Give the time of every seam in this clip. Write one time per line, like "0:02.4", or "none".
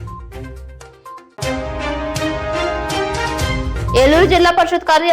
0:01.4
0:03.9

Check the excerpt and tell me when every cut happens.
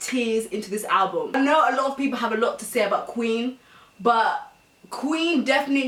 none

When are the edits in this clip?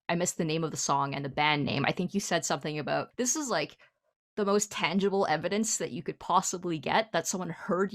0:03.1

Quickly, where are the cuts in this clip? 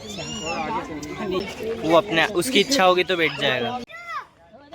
0:01.5
0:03.9

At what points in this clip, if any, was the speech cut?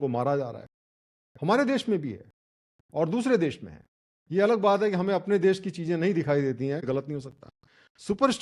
0:06.8

